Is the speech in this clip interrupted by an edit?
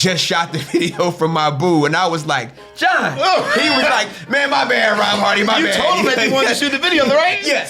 no; 0 cuts

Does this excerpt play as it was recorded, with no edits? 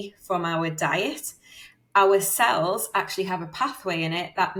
yes; 0 cuts

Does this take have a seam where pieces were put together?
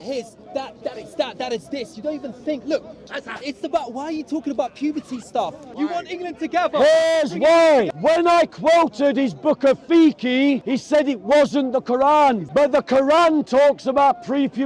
yes; 5 cuts; at 3.1 s, 5.7 s, 7.9 s, 10.6 s, 12.4 s

